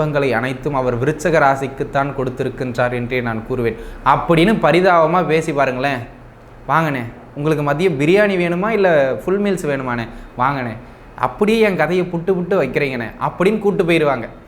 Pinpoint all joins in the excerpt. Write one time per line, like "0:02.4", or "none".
none